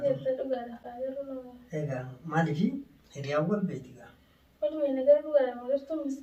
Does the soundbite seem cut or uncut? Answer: uncut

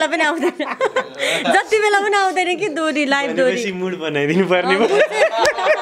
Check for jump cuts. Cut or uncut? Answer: uncut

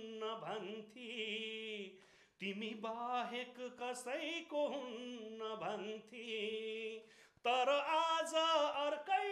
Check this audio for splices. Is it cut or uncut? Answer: uncut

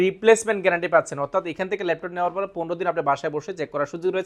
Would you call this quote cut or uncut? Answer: uncut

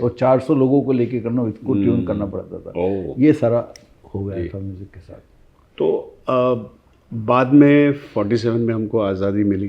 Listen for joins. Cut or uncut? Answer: uncut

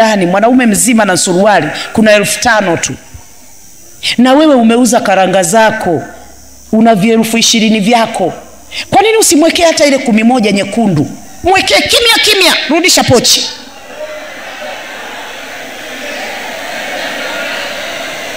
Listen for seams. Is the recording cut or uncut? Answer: uncut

